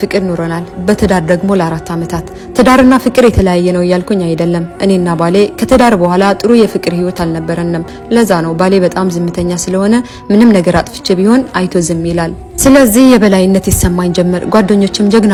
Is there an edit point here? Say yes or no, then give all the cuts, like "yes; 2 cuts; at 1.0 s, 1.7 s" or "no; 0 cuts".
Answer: no; 0 cuts